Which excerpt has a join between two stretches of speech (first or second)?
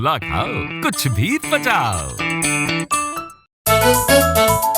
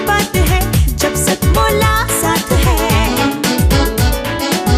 first